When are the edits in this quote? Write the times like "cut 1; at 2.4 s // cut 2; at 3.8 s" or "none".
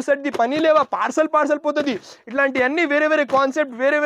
none